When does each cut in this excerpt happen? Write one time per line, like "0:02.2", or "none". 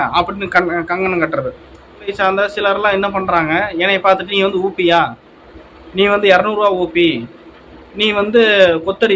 0:02.1

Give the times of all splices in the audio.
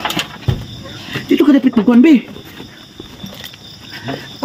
none

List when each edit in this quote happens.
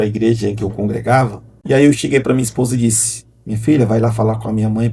0:01.5

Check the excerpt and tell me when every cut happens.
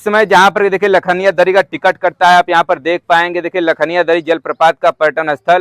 none

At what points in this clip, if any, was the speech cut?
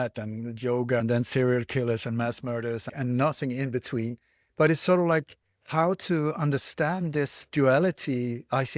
0:01.0
0:02.9
0:04.4

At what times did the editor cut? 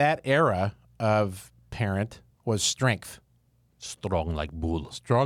0:02.3

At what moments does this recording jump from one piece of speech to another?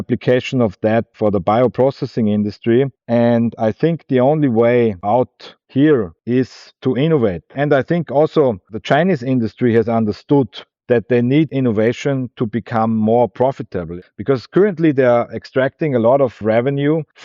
0:07.5

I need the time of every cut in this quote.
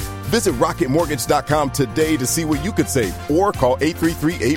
none

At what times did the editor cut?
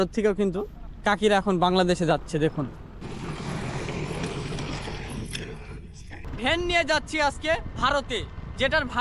0:06.2

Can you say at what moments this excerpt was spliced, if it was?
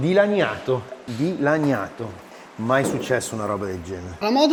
none

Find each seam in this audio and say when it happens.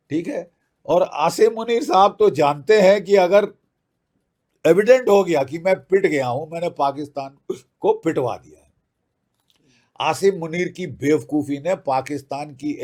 none

